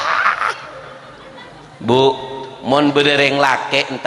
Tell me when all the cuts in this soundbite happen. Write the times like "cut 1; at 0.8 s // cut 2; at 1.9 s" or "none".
none